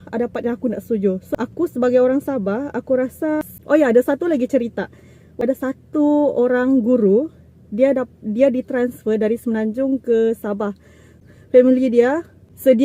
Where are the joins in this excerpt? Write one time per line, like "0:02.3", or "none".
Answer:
0:01.2
0:03.5
0:05.4
0:11.1